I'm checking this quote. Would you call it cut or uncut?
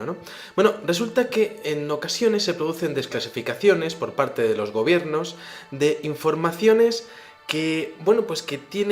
cut